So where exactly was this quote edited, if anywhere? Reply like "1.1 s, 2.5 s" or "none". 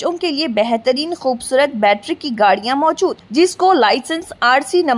none